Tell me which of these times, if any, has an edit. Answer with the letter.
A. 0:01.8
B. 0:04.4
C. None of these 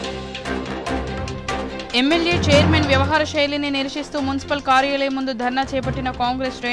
A